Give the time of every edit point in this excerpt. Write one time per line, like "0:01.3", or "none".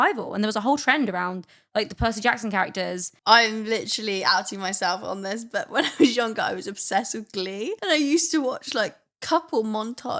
0:03.1
0:07.8